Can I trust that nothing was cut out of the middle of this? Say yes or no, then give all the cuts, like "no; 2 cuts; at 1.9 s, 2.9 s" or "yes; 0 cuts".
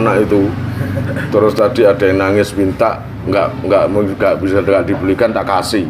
yes; 0 cuts